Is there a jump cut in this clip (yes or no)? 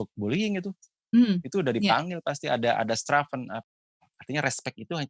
yes